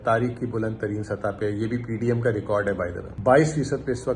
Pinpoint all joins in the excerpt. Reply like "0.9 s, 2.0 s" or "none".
3.1 s